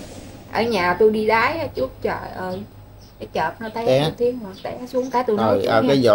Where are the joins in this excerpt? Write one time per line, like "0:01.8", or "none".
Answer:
none